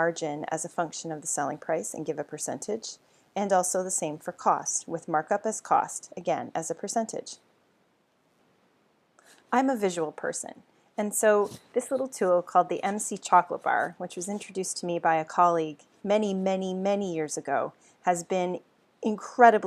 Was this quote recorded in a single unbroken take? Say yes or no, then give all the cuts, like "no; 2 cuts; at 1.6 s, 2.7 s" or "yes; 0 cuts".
yes; 0 cuts